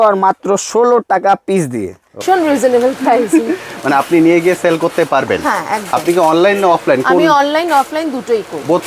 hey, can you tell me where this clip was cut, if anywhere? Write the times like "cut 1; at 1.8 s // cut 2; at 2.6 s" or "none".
cut 1; at 2.1 s